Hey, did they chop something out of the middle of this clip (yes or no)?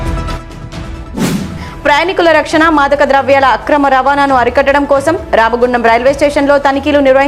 yes